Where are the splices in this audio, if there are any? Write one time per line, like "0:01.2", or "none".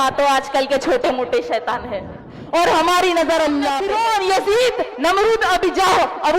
0:03.8